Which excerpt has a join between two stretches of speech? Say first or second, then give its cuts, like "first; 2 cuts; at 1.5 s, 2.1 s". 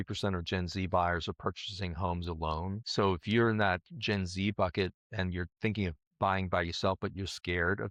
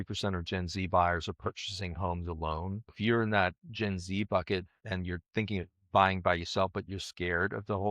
second; 1 cut; at 2.9 s